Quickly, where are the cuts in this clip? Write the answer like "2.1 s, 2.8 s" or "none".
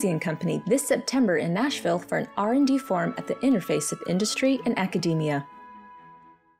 5.5 s

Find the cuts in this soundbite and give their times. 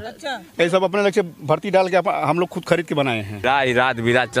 3.4 s

